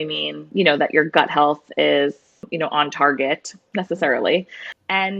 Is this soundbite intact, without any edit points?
no; 1 cut; at 3.6 s

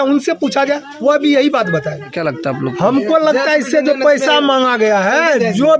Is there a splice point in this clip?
yes; 1 cut; at 2.1 s

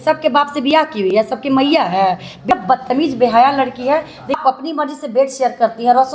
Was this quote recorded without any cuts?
no; 2 cuts; at 2.4 s, 4.4 s

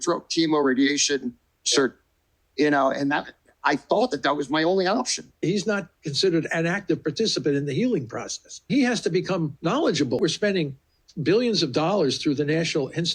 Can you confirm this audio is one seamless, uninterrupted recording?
no; 3 cuts; at 5.4 s, 8.7 s, 10.2 s

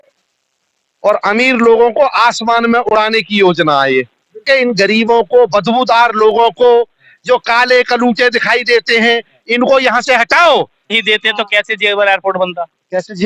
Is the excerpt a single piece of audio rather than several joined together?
no; 2 cuts; at 4.4 s, 10.9 s

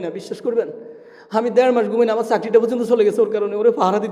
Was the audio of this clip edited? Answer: no; 0 cuts

